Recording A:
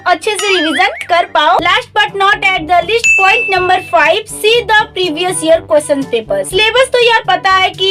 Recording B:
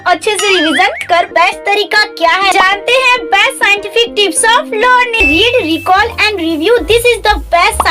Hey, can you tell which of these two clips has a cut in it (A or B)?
B